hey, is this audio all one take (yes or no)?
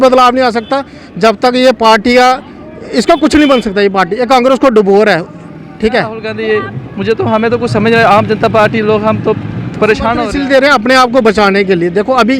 no